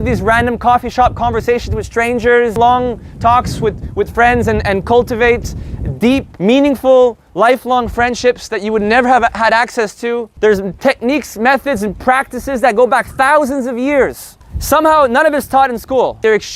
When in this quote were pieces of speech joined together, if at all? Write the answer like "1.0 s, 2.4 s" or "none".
2.6 s, 6.3 s, 7.2 s, 10.3 s